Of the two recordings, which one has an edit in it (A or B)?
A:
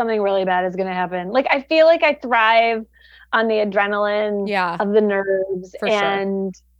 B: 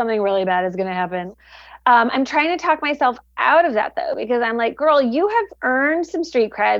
B